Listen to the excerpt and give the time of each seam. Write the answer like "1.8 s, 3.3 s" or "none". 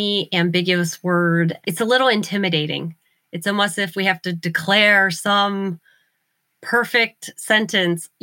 none